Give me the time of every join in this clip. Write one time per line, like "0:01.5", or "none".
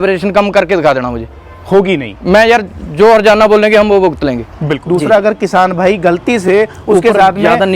0:04.8